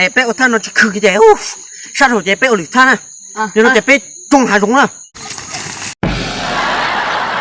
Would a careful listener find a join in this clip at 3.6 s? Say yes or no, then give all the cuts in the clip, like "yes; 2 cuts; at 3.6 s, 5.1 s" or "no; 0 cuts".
no; 1 cut; at 5.0 s